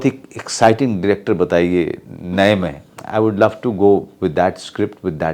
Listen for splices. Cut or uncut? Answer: uncut